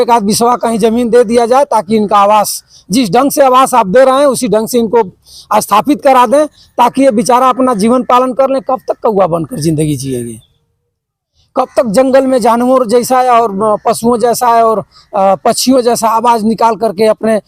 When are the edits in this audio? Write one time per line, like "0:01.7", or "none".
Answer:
none